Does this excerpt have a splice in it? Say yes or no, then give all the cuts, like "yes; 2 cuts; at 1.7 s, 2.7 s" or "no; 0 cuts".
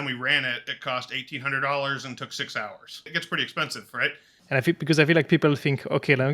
yes; 2 cuts; at 3.1 s, 4.3 s